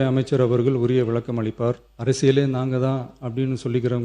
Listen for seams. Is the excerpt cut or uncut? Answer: cut